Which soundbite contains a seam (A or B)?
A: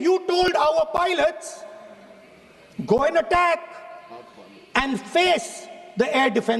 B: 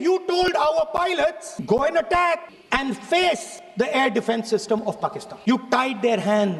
B